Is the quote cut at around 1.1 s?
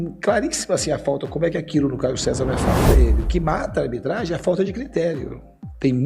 no; 1 cut; at 2.8 s

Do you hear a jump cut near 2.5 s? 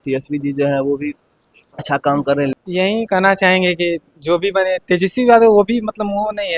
yes; 1 cut; at 2.5 s

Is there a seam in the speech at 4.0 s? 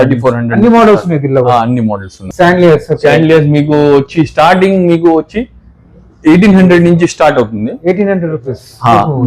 no; 1 cut; at 2.2 s

